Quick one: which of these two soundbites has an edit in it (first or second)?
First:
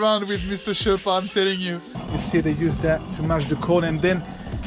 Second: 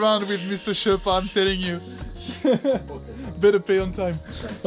first